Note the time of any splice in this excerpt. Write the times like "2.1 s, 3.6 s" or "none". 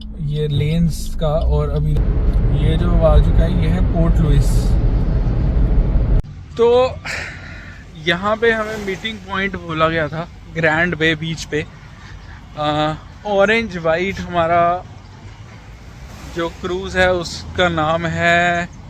2.0 s, 6.2 s